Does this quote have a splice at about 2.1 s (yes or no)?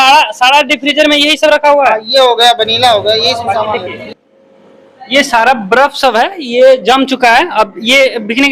no